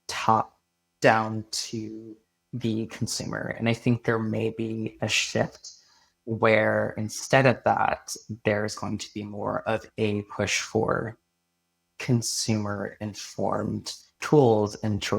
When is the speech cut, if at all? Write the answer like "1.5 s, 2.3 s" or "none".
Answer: 14.1 s